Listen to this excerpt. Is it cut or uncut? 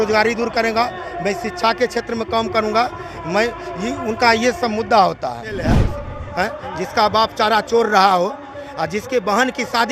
cut